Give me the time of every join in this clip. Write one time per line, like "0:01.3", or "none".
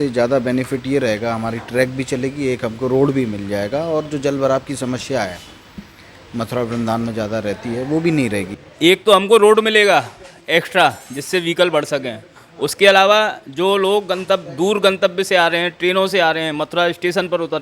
0:08.5